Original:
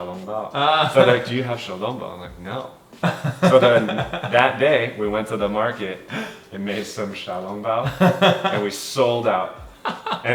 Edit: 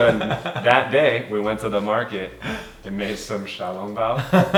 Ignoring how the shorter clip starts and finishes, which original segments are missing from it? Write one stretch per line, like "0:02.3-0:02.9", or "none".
none